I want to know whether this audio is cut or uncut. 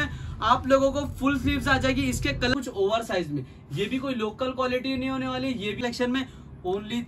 cut